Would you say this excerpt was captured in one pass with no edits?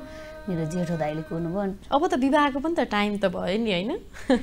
no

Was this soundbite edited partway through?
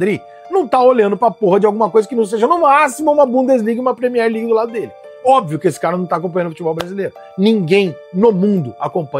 no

